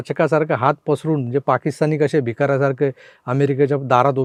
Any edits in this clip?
no; 0 cuts

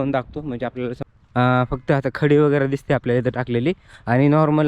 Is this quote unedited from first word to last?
no; 1 cut; at 1.0 s

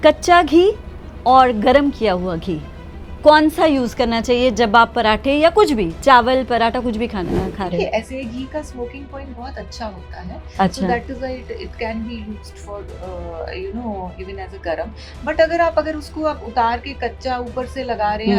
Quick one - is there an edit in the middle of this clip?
no; 0 cuts

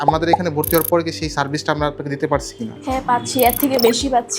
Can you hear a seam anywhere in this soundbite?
no; 0 cuts

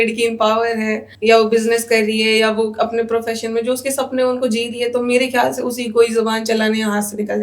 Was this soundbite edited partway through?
yes; 1 cut; at 1.1 s

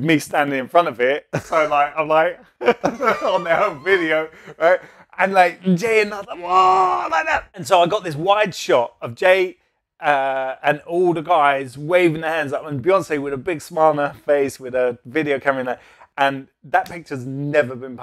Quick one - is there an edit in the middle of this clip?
no; 0 cuts

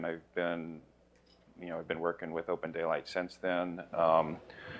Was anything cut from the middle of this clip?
no; 0 cuts

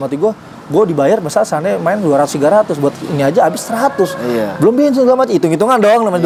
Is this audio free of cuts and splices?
yes; 0 cuts

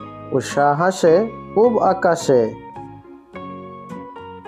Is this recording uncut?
yes; 0 cuts

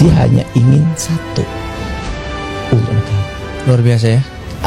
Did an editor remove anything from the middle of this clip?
no; 0 cuts

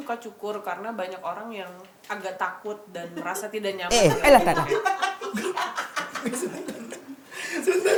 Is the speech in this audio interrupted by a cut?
no; 0 cuts

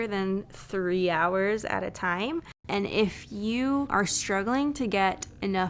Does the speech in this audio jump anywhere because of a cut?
yes; 2 cuts; at 2.6 s, 3.9 s

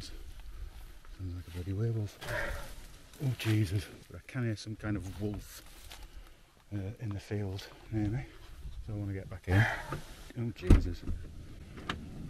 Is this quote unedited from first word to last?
no; 2 cuts; at 2.2 s, 3.9 s

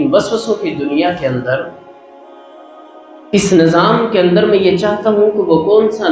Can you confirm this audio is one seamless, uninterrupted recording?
no; 2 cuts; at 1.7 s, 3.3 s

